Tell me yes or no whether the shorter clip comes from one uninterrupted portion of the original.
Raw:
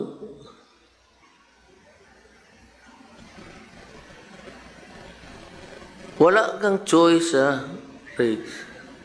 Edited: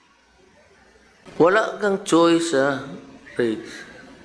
no